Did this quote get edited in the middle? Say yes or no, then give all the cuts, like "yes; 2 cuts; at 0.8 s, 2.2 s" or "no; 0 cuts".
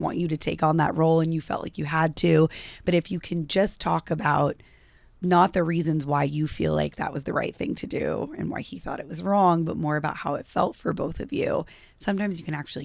no; 0 cuts